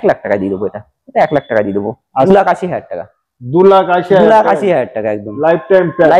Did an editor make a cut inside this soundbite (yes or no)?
yes